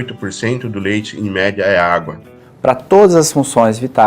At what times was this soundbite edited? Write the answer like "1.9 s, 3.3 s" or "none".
2.5 s